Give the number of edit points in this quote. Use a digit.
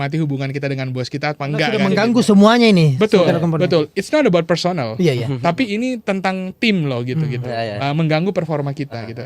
1